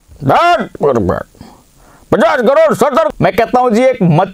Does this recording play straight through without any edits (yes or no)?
no